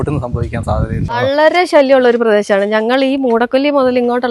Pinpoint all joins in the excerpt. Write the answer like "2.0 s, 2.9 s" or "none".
1.2 s